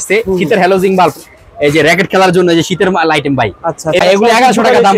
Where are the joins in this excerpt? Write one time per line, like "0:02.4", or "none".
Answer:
0:04.0